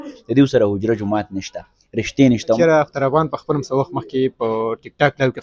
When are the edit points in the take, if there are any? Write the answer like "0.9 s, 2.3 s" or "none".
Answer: 2.6 s